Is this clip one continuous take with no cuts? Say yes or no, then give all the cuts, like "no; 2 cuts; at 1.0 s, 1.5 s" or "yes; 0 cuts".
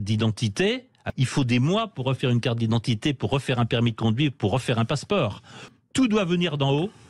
no; 2 cuts; at 1.0 s, 5.7 s